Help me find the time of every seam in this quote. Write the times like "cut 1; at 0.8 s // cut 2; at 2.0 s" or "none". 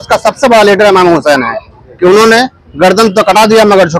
none